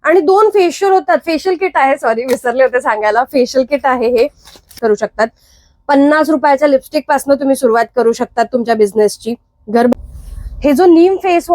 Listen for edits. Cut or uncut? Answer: cut